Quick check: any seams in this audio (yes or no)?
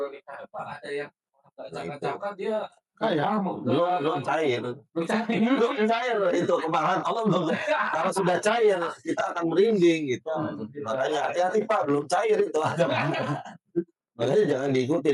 no